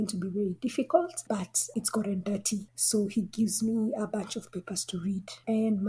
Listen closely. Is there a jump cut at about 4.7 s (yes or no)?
no